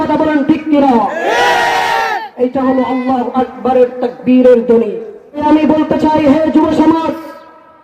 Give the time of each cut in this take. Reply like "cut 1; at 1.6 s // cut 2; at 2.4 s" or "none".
cut 1; at 5.4 s